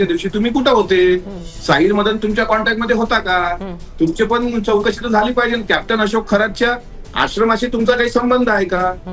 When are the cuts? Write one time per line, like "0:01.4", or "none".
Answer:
none